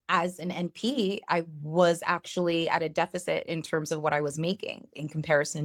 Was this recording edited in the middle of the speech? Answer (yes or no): no